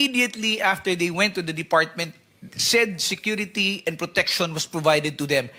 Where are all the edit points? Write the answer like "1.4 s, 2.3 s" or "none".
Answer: none